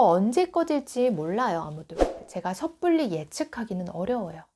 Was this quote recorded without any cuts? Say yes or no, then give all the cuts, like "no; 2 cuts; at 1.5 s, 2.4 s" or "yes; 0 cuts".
no; 1 cut; at 2.2 s